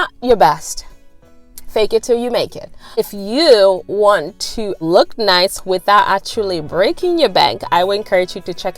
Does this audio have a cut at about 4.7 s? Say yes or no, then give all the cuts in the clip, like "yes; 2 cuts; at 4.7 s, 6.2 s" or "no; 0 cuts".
yes; 2 cuts; at 2.7 s, 4.7 s